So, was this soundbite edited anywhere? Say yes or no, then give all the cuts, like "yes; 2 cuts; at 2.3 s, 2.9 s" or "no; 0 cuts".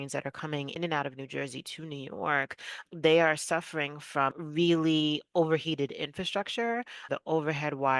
yes; 4 cuts; at 0.7 s, 2.8 s, 4.4 s, 7.0 s